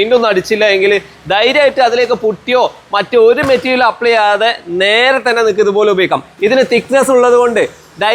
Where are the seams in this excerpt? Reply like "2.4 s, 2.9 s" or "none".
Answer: none